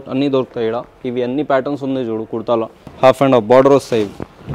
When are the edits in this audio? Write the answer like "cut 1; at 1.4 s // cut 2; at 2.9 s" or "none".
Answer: cut 1; at 2.8 s